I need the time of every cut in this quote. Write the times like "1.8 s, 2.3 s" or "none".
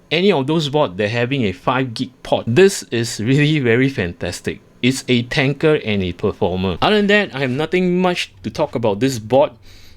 2.5 s, 6.8 s